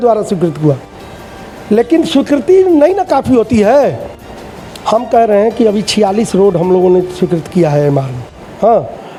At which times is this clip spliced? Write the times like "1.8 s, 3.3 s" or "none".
none

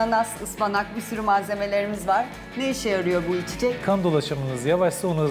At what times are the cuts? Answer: 3.8 s

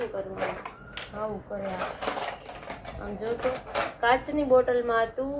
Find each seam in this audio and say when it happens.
none

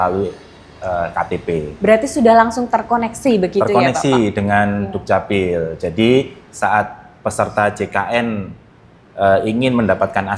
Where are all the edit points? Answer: none

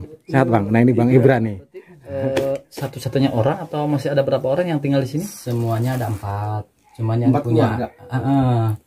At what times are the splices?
2.0 s

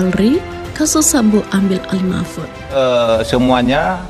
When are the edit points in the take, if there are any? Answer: 2.7 s

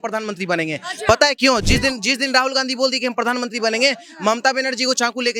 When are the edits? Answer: none

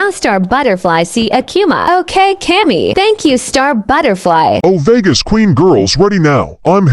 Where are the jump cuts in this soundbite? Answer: 4.6 s

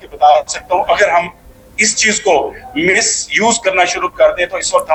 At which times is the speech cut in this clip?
none

